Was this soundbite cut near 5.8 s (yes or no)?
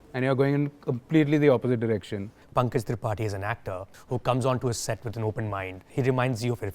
yes